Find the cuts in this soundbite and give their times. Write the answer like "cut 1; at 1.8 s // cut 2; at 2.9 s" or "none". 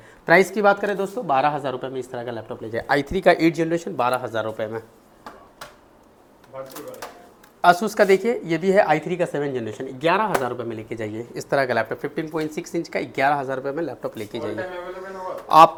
none